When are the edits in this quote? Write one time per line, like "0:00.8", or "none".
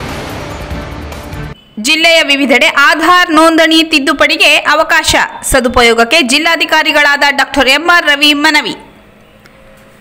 none